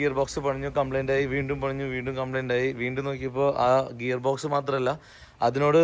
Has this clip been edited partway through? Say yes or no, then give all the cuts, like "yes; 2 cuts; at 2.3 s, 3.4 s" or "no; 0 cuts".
no; 0 cuts